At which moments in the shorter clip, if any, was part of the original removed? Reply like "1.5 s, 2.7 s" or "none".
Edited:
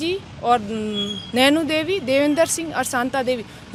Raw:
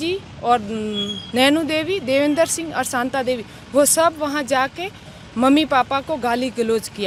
none